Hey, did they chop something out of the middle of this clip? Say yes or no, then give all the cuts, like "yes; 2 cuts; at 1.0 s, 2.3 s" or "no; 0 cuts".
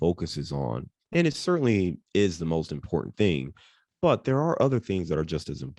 no; 0 cuts